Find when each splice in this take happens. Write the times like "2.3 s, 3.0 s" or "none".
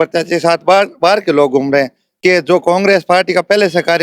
2.2 s